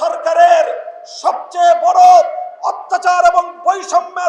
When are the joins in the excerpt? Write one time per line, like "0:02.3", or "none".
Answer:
none